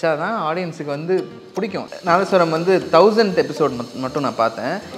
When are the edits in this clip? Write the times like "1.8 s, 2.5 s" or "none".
1.8 s